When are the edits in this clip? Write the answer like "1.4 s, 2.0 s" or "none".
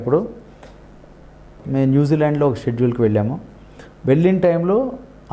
1.5 s